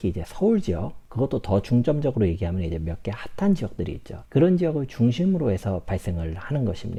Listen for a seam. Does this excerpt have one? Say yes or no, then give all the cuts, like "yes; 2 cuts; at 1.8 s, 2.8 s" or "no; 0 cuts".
no; 0 cuts